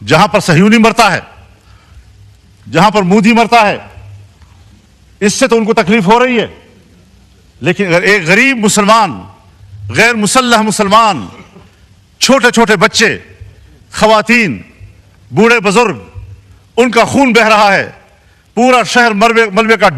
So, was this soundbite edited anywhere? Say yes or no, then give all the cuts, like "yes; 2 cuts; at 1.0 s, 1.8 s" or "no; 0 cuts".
no; 0 cuts